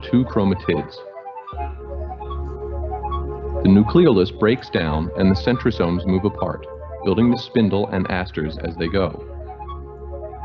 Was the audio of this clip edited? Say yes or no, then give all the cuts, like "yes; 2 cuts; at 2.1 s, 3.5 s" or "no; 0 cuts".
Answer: yes; 2 cuts; at 2.2 s, 3.5 s